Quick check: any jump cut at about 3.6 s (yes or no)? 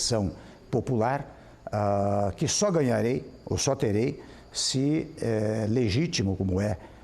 no